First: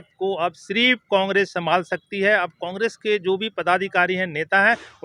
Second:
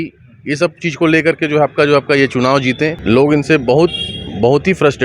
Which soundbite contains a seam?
second; 1 cut; at 3.0 s

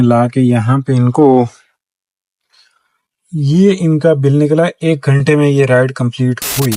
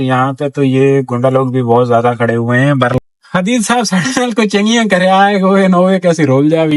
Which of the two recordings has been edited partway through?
second; 1 cut; at 3.0 s

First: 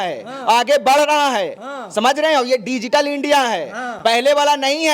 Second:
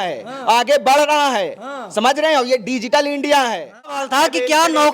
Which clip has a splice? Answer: second; 1 cut; at 4.0 s

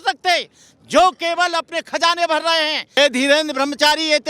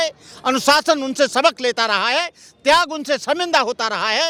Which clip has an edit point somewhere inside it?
first; 1 cut; at 3.0 s

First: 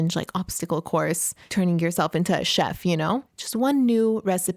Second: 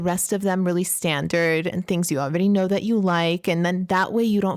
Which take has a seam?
first; 2 cuts; at 1.3 s, 3.4 s

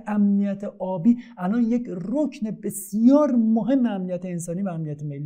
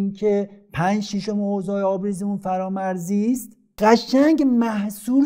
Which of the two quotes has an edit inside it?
second; 1 cut; at 3.6 s

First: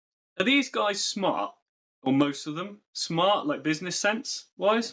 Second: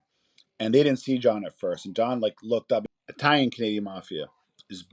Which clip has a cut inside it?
second; 1 cut; at 2.9 s

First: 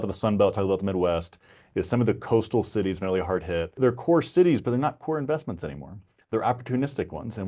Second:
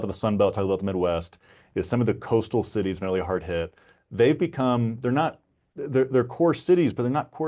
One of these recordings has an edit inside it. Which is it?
first; 1 cut; at 3.8 s

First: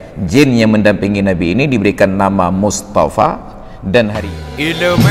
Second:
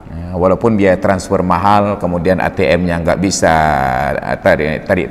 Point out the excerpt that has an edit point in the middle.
first; 1 cut; at 4.2 s

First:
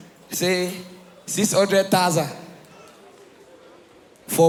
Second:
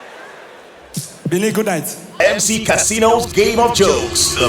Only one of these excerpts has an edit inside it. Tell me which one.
second; 1 cut; at 2.2 s

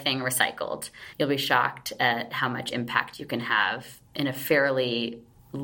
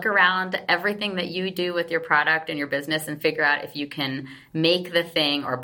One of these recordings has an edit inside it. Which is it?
first; 1 cut; at 1.0 s

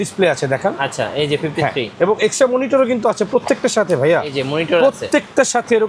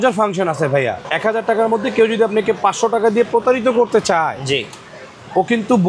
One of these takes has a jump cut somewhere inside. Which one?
second; 1 cut; at 1.0 s

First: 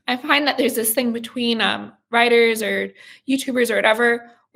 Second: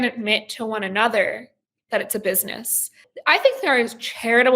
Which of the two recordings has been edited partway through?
second; 1 cut; at 3.0 s

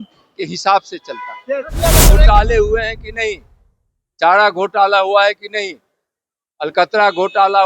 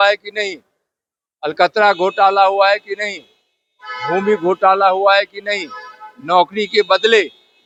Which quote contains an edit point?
first; 1 cut; at 2.1 s

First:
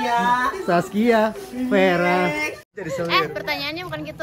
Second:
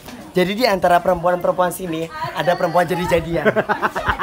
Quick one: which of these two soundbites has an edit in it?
first; 1 cut; at 2.7 s

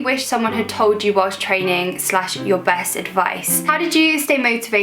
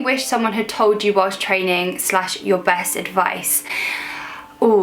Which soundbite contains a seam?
first; 1 cut; at 3.5 s

